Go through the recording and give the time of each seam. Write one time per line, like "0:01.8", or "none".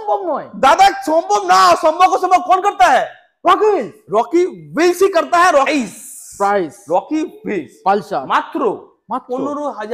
0:05.7